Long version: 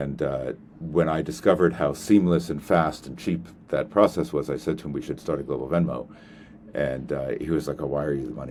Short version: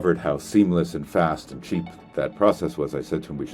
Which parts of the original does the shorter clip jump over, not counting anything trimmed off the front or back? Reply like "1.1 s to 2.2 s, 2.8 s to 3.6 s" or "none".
none